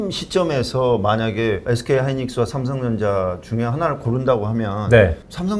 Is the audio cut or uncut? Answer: uncut